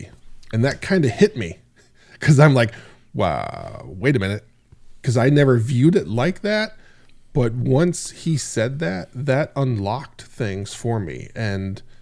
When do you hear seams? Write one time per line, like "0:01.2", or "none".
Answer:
none